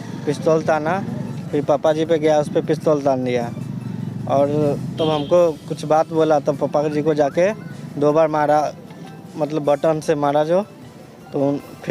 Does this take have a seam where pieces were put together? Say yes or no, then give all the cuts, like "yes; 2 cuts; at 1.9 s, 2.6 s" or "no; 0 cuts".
no; 0 cuts